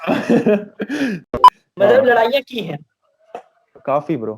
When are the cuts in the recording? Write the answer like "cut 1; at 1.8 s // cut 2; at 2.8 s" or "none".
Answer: cut 1; at 1.3 s